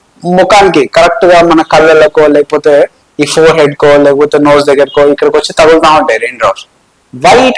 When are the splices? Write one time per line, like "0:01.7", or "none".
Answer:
none